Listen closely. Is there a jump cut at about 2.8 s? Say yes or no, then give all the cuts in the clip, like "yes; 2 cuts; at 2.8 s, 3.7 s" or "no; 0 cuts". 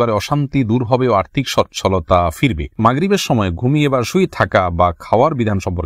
yes; 1 cut; at 2.8 s